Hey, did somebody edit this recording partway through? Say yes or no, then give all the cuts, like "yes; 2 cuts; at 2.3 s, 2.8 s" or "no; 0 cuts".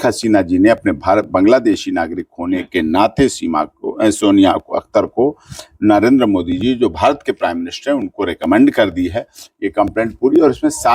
no; 0 cuts